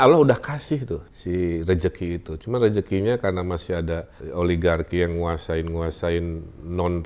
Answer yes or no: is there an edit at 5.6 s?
no